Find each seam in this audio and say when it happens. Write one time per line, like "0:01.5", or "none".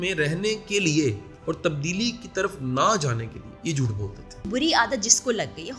0:01.3
0:04.5